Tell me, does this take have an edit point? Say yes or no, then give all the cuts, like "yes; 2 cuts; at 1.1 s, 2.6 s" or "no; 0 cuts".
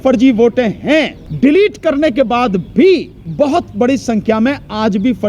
yes; 1 cut; at 1.2 s